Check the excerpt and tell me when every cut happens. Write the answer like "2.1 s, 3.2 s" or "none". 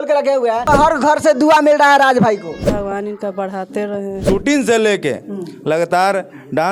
0.7 s, 2.7 s, 4.2 s